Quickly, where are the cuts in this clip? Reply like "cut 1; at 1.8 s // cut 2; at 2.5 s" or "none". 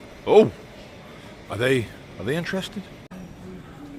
cut 1; at 3.1 s